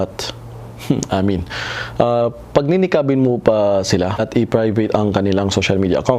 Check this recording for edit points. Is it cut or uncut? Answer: cut